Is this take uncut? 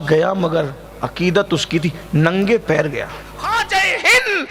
no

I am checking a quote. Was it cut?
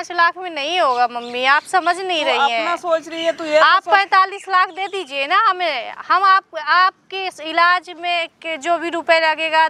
no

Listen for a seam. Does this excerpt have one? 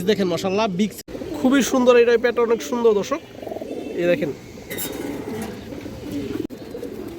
yes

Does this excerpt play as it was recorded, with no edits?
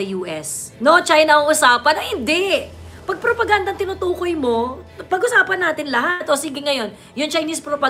yes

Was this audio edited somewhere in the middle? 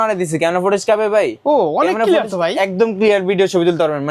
no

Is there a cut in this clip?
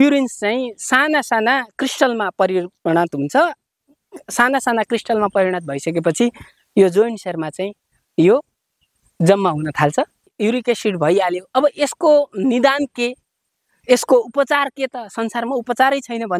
yes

